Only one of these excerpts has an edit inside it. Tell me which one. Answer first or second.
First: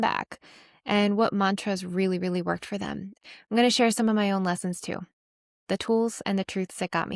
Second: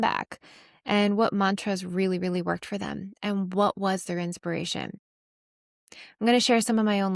first